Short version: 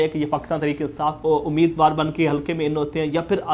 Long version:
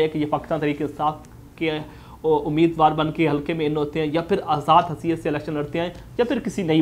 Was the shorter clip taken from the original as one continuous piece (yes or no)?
no